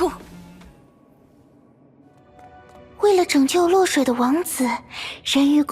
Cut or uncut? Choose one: cut